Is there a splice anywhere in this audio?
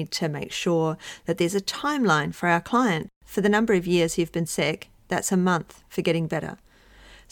yes; 1 cut; at 3.1 s

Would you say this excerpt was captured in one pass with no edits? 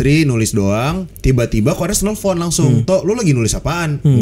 no; 1 cut; at 1.1 s

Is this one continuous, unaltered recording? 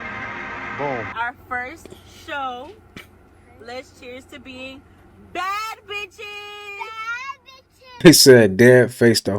no; 2 cuts; at 1.1 s, 8.0 s

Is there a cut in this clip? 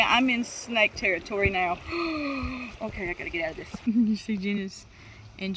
yes; 1 cut; at 3.7 s

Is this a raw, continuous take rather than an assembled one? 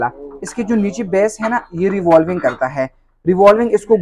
yes; 0 cuts

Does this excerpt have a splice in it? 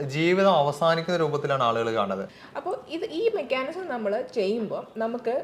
yes; 1 cut; at 2.4 s

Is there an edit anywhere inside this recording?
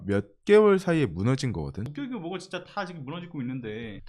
yes; 1 cut; at 1.8 s

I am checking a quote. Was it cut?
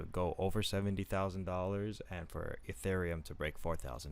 no; 0 cuts

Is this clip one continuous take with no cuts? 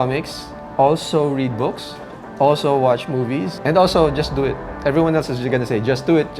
no; 1 cut; at 3.5 s

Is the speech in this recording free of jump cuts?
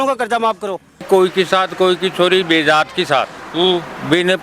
no; 1 cut; at 0.9 s

